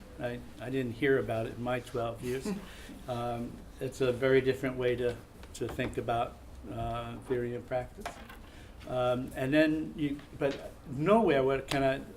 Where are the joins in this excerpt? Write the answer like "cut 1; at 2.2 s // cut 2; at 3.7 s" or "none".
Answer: none